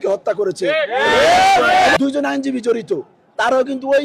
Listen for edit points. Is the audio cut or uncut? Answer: cut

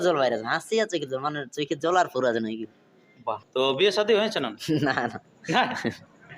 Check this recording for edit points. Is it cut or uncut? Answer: cut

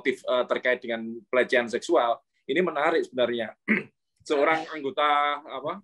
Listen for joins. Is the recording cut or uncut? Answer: uncut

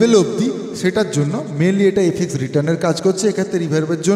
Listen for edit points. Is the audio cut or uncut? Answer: uncut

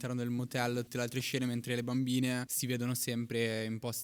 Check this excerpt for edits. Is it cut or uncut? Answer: cut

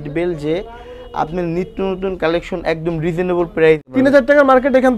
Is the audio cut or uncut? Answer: cut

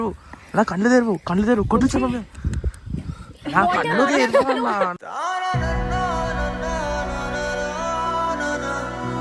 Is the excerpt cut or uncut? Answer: uncut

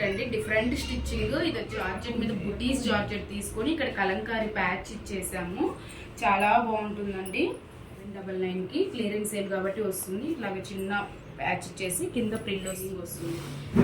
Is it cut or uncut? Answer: cut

